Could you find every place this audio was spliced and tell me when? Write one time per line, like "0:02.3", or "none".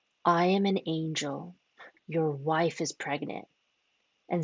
none

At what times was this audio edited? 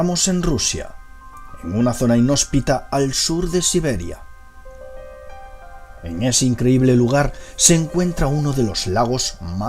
0:02.4

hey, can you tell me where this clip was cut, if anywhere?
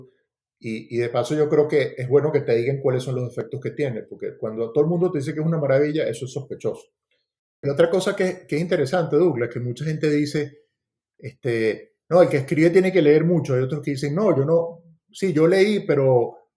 0:07.6

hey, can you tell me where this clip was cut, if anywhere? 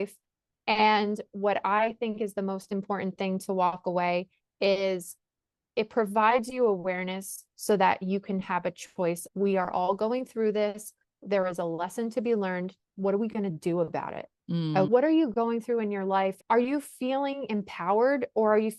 0:09.2
0:14.9
0:16.4

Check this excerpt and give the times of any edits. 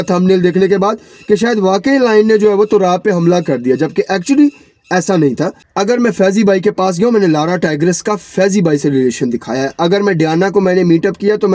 0:05.6

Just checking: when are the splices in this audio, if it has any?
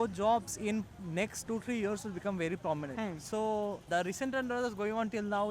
0:01.5
0:02.9
0:03.9

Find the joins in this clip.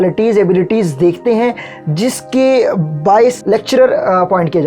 0:03.4

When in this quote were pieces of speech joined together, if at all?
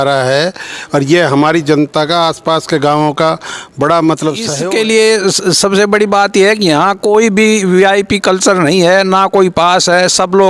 0:04.5

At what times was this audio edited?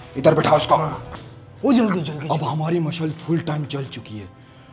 0:01.0

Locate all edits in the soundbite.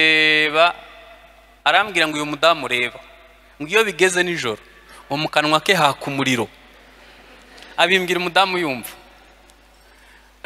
none

